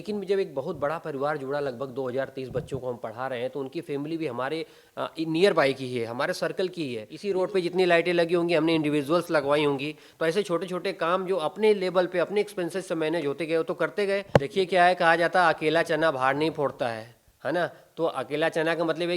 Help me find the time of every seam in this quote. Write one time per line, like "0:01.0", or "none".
0:07.1
0:14.2

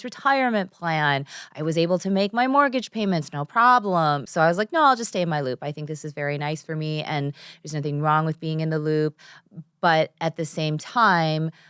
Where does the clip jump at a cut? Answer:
0:04.2

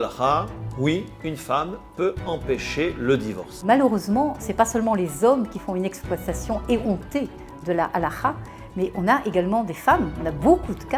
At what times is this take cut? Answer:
none

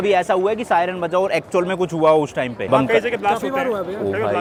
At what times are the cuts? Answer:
none

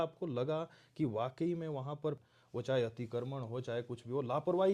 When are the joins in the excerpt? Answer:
0:02.2

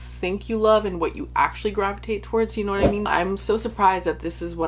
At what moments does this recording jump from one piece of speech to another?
0:03.1

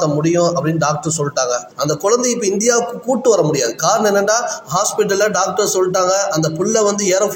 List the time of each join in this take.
0:01.7

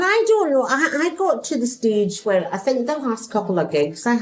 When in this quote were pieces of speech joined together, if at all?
none

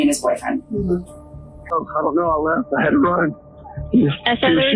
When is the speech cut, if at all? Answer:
0:01.7

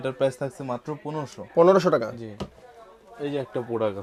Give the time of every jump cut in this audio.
none

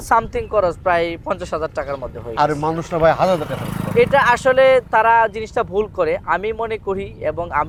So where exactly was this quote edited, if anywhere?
none

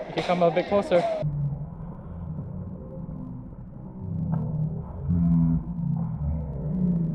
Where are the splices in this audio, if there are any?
none

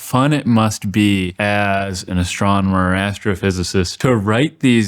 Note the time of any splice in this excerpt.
0:01.3
0:03.9

